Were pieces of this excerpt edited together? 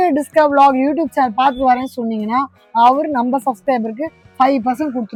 no; 0 cuts

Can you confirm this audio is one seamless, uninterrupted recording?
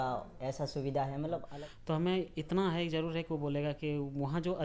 no; 1 cut; at 1.5 s

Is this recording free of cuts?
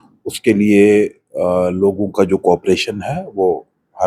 yes; 0 cuts

